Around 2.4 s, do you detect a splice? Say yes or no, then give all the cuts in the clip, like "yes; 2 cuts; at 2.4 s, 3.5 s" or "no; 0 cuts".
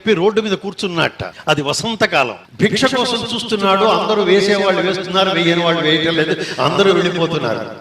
yes; 2 cuts; at 1.3 s, 2.4 s